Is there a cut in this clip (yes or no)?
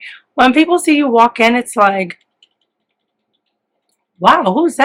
no